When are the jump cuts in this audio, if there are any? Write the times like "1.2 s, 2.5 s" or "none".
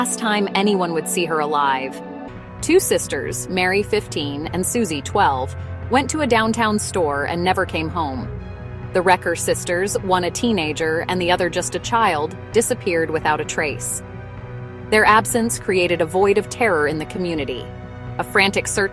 2.2 s

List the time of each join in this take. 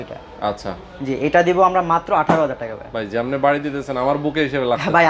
none

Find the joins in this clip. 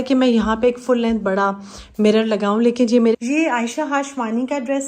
3.1 s

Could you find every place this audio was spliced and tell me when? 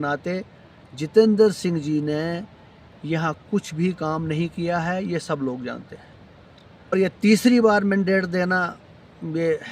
6.9 s

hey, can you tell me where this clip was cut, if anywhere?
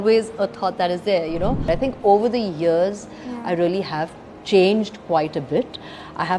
1.6 s

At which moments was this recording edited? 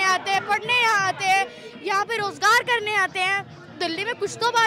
none

